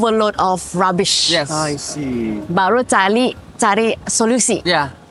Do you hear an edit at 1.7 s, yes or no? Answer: no